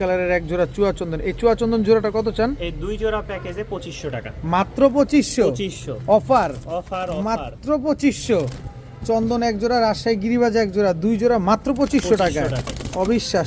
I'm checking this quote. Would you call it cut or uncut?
uncut